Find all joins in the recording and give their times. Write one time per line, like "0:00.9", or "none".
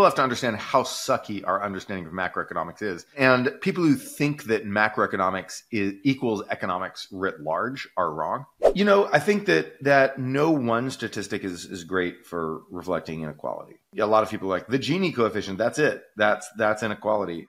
0:03.1
0:08.6
0:13.9